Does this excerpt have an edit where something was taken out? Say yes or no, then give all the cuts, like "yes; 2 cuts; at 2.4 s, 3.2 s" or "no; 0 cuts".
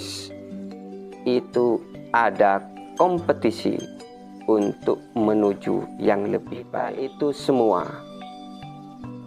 yes; 1 cut; at 6.8 s